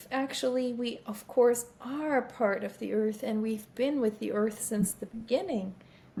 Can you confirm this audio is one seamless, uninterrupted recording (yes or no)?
yes